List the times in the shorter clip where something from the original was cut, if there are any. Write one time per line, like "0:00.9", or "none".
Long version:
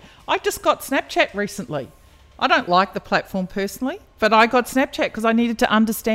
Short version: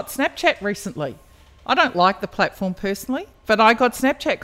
none

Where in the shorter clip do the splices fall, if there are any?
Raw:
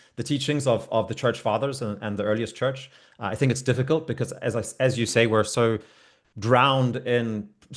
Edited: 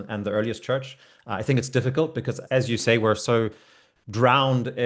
0:02.4

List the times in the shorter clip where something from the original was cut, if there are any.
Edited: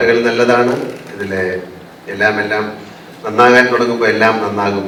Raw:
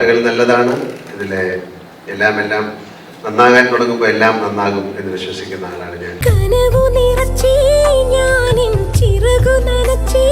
none

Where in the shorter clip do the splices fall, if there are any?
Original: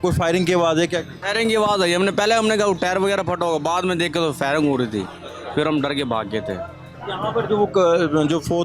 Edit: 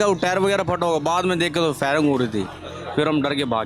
none

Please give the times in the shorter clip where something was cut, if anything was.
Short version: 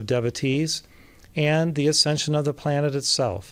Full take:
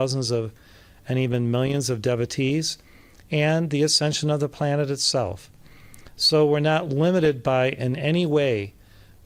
none

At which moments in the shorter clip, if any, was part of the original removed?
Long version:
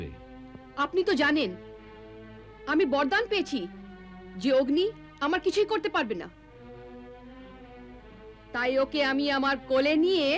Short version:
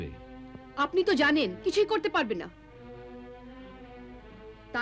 0:01.6

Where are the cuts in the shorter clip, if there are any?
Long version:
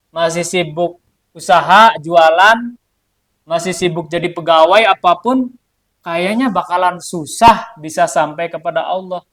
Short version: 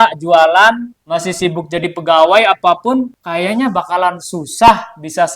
0:00.9
0:03.2

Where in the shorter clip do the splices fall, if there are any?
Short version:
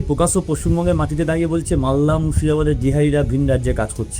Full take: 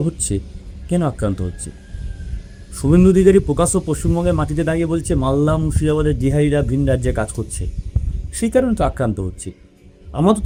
none

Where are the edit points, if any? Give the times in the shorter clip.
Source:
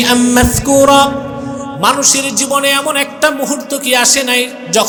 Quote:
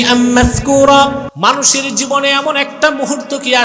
0:01.3

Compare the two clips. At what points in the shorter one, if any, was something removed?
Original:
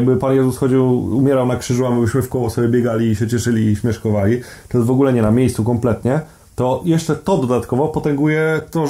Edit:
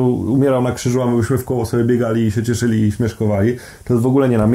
none

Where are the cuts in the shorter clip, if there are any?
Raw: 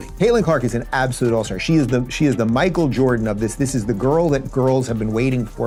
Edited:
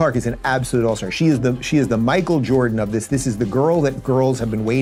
none

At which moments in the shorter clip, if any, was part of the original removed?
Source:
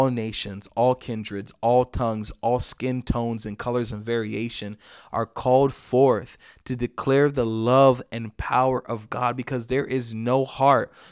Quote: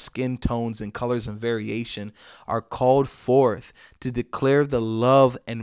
none

